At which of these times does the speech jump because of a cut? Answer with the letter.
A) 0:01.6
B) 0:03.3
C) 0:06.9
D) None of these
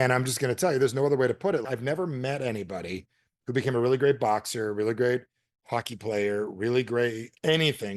A